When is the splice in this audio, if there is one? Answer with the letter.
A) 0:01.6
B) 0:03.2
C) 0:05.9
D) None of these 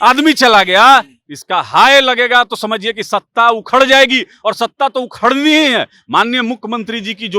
D